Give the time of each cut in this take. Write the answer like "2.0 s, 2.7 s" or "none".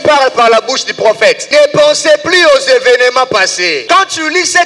1.4 s, 3.8 s